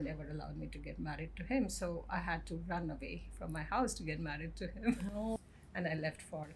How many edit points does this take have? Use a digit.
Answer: 1